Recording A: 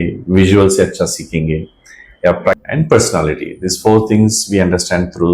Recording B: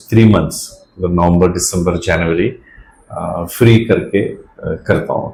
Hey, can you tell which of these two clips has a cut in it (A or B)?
A